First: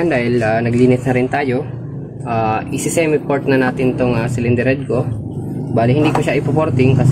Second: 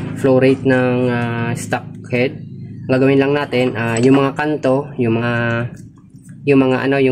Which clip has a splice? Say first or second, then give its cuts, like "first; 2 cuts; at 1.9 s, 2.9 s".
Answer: second; 1 cut; at 5.2 s